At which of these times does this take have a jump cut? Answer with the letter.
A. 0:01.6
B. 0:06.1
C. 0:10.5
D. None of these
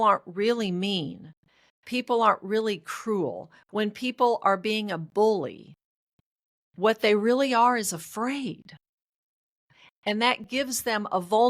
C